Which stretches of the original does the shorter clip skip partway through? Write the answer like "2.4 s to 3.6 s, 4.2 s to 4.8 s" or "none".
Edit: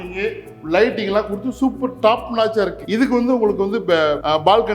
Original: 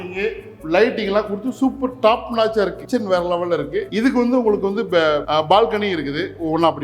2.8 s to 3.8 s